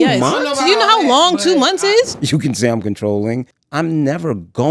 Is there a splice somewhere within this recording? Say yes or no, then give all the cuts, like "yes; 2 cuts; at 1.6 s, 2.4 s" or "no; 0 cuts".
yes; 2 cuts; at 2.1 s, 3.6 s